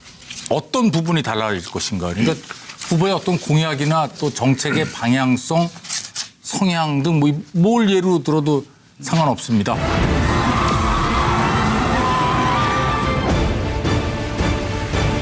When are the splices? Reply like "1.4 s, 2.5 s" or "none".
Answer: 13.5 s